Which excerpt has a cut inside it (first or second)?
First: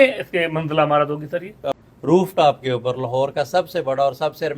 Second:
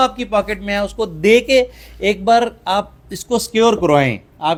first